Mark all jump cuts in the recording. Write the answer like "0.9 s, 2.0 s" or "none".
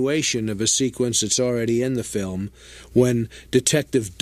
none